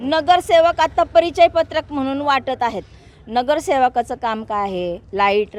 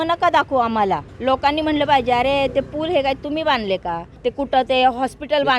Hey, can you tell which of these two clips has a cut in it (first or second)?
second